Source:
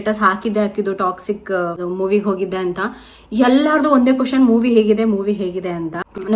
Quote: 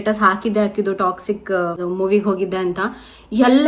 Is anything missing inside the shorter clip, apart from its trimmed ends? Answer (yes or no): no